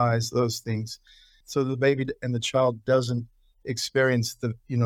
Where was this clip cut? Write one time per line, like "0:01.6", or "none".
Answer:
none

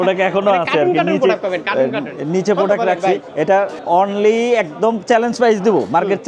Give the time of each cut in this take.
none

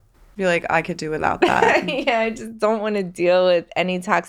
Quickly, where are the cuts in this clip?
none

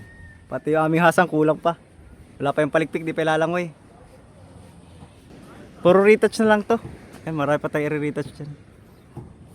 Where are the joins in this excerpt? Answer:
0:05.3

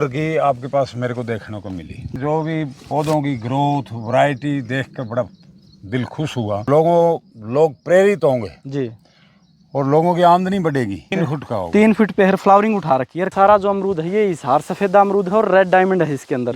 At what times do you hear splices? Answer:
0:02.1
0:06.7
0:11.1
0:13.3

